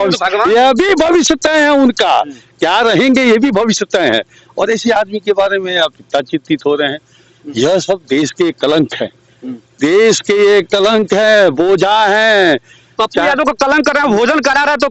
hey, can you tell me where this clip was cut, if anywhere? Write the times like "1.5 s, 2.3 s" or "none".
none